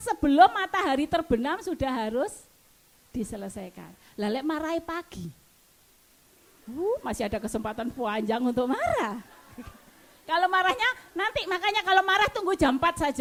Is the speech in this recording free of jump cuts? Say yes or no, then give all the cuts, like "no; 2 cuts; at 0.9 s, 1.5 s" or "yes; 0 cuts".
yes; 0 cuts